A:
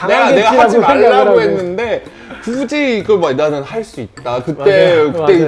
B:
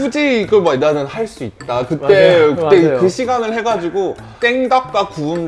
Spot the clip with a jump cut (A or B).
B